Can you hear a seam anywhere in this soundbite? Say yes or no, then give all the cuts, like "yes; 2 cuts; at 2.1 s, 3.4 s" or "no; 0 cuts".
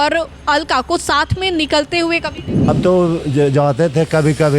yes; 1 cut; at 2.7 s